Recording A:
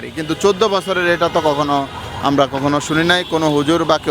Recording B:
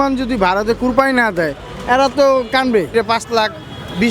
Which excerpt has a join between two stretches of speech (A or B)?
B